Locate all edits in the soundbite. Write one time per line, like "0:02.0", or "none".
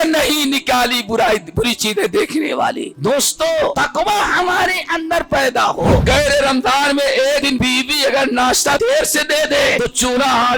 0:02.9
0:03.7
0:06.0
0:07.5
0:08.8
0:09.8

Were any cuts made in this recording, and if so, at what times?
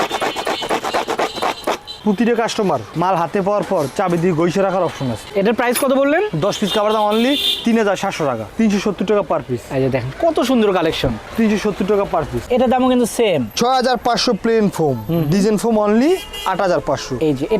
0:01.9
0:05.2
0:12.4

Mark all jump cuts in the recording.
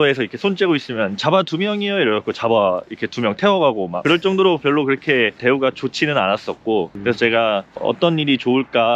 0:06.9

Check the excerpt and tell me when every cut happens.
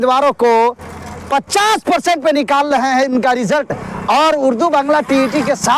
none

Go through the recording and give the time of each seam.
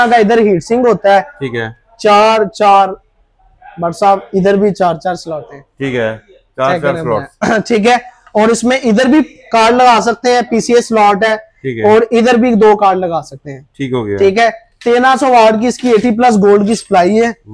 none

